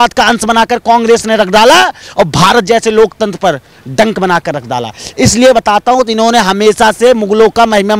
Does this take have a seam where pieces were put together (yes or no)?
no